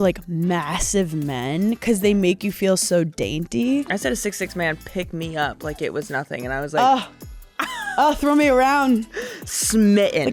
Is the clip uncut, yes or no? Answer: no